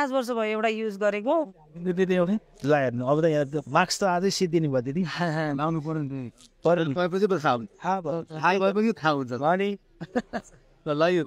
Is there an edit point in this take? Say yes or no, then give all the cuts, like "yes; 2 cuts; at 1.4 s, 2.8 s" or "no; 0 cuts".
no; 0 cuts